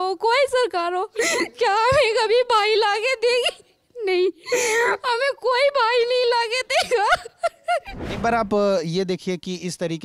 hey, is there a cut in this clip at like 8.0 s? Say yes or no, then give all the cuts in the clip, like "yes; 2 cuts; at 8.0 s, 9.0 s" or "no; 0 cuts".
yes; 1 cut; at 8.0 s